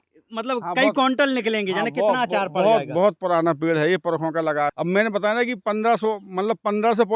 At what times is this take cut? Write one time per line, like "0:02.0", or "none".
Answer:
0:04.7